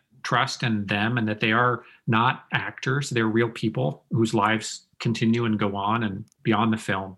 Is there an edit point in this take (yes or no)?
no